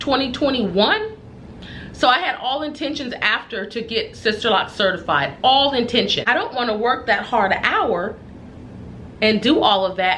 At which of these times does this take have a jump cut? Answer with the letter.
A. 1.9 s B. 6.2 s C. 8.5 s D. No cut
B